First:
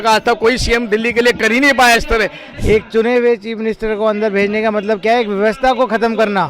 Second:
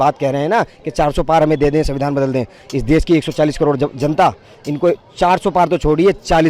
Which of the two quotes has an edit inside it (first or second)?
first